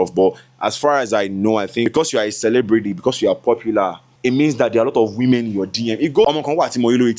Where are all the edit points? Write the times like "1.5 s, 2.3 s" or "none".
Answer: 1.8 s, 4.1 s, 6.2 s